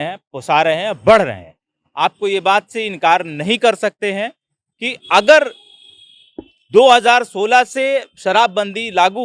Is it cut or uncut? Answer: uncut